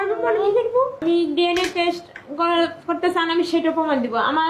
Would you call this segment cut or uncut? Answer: cut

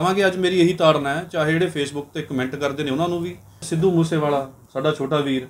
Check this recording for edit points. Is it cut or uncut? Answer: cut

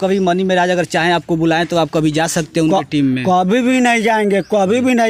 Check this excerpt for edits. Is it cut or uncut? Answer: uncut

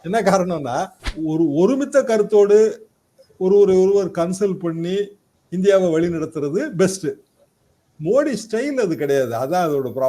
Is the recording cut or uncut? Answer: cut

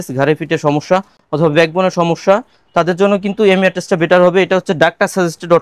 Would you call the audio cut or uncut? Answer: uncut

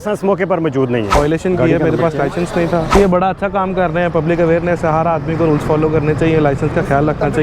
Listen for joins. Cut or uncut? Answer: cut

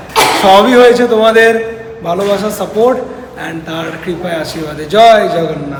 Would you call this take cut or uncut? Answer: uncut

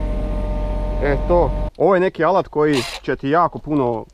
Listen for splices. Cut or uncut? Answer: cut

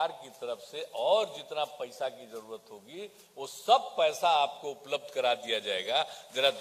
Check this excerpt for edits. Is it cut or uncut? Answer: uncut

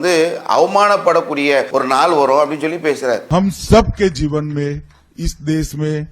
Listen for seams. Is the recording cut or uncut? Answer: cut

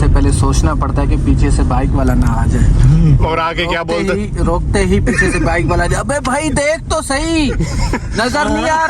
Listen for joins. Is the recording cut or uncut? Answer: uncut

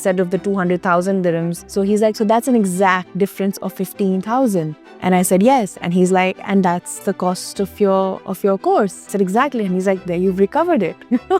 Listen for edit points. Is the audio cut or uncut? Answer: cut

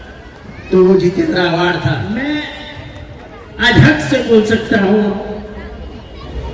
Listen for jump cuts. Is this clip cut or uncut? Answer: cut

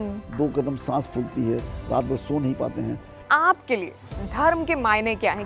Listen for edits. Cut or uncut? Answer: cut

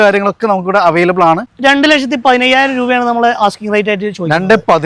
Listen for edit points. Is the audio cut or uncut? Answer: cut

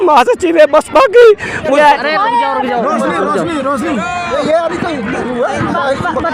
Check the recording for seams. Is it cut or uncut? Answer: cut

